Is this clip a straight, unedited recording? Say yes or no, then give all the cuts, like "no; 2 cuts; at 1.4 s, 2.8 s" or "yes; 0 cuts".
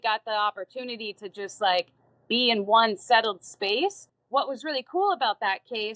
no; 1 cut; at 4.1 s